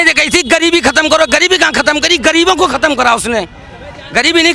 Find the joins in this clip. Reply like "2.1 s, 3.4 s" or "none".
none